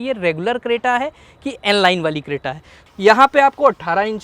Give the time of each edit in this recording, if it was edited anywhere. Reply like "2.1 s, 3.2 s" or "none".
2.6 s